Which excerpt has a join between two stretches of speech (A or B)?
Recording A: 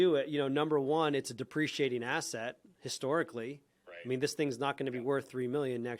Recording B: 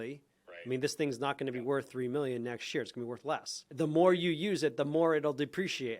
B